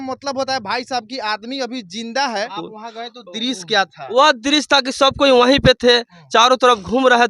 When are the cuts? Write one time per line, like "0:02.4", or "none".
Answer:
0:02.6